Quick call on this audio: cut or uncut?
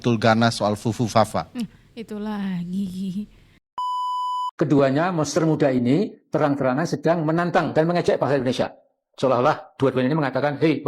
cut